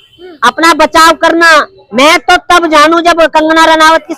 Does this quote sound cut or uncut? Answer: uncut